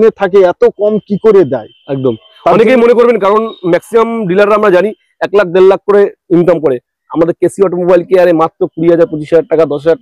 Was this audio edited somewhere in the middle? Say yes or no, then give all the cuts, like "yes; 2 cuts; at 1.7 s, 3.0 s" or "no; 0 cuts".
no; 0 cuts